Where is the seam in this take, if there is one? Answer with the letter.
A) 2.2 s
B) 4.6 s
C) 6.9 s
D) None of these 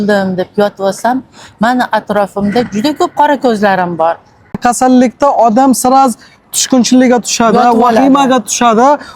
B